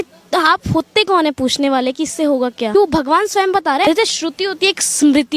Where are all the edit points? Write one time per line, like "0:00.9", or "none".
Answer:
0:02.7
0:03.9